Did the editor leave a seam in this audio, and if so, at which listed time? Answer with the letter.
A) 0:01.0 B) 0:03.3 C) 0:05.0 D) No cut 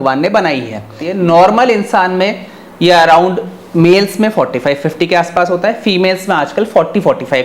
A